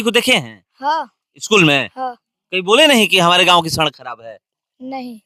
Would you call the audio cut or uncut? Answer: uncut